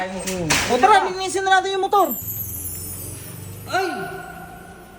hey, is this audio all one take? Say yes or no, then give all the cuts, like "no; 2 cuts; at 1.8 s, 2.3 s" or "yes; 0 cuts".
no; 1 cut; at 2.2 s